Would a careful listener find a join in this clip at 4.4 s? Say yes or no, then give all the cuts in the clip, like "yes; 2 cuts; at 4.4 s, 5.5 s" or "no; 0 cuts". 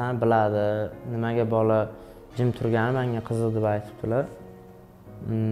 no; 0 cuts